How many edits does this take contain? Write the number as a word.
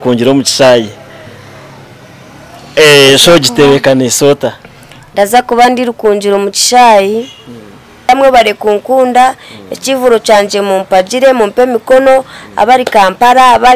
one